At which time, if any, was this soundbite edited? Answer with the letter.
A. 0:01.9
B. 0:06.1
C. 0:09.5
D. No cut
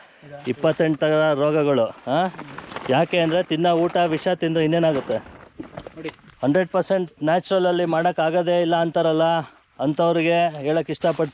B